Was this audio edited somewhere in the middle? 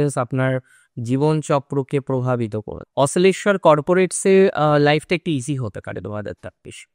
yes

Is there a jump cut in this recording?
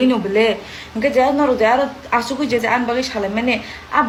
no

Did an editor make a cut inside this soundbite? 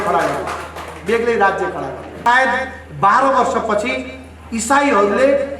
yes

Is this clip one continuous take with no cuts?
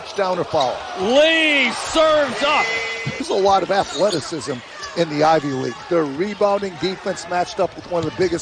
yes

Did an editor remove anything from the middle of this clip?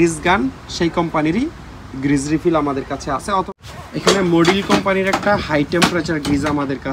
yes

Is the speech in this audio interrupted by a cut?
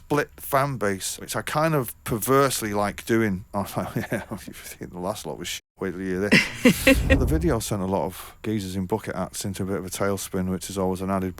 yes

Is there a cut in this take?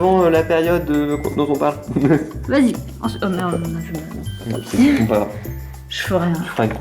no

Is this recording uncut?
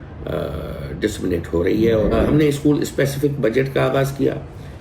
no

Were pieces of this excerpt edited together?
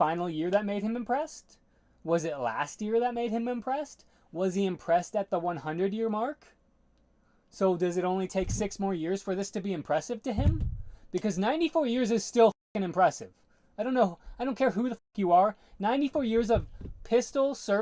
no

